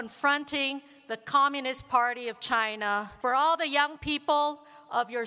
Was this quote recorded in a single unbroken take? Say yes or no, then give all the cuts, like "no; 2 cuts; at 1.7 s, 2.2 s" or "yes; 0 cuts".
no; 1 cut; at 3.1 s